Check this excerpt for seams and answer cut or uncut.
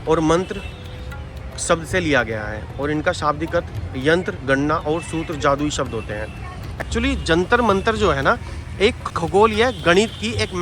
cut